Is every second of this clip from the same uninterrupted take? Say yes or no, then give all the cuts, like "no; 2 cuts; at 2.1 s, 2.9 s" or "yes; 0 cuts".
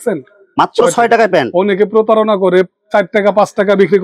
yes; 0 cuts